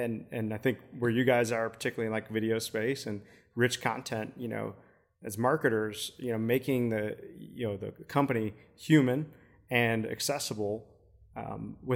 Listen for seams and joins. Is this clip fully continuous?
yes; 0 cuts

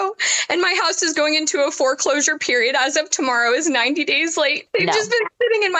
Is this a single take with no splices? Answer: no; 1 cut; at 4.6 s

